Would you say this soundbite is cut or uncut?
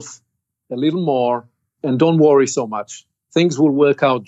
cut